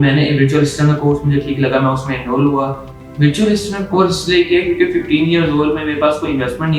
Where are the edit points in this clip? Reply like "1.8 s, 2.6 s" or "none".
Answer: 2.9 s